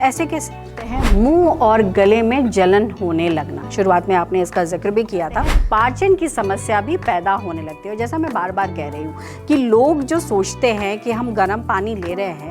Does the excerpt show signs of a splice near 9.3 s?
no; 2 cuts; at 1.0 s, 5.5 s

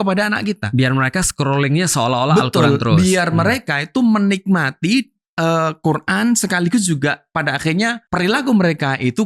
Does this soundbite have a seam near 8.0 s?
yes; 1 cut; at 8.0 s

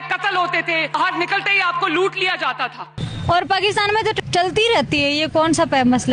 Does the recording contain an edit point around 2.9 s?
yes; 3 cuts; at 0.9 s, 2.9 s, 4.2 s

